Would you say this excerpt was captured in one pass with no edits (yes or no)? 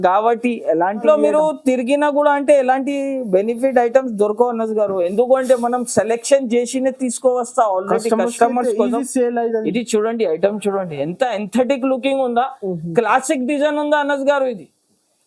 no